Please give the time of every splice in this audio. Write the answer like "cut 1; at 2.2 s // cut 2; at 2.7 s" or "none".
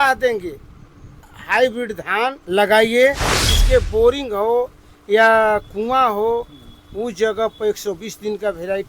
cut 1; at 1.3 s // cut 2; at 2.4 s // cut 3; at 3.5 s